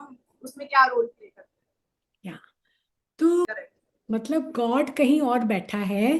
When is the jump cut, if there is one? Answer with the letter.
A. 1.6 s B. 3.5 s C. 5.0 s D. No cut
B